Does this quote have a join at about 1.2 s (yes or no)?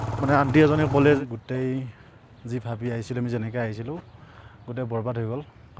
yes